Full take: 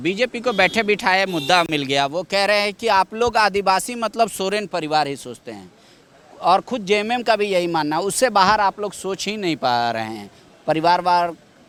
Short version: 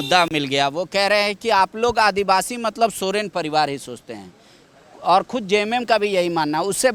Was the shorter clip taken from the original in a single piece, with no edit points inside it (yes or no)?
yes